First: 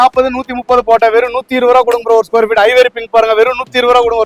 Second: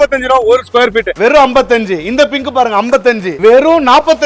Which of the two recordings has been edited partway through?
second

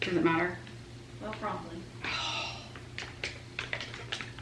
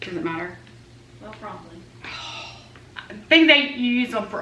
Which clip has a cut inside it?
second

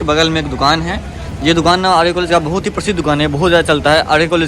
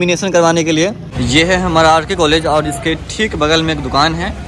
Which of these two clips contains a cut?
second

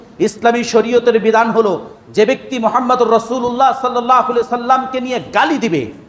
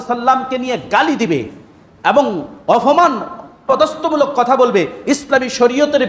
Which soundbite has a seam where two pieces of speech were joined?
second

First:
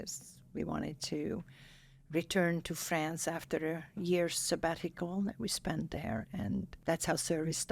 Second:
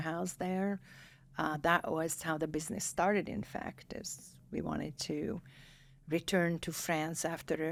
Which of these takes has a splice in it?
first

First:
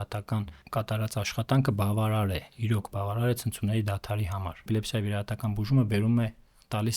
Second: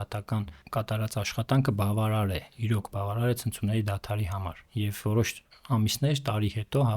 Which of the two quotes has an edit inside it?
first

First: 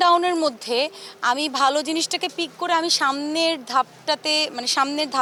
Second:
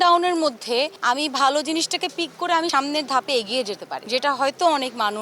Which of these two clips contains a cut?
second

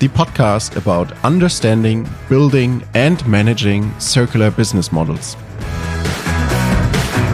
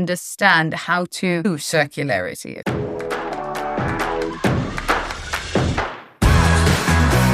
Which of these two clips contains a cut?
second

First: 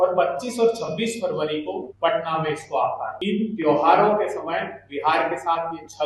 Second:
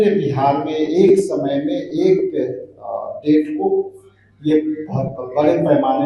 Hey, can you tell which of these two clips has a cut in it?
first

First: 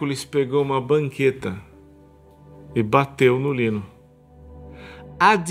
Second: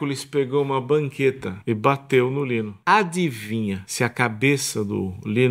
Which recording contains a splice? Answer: second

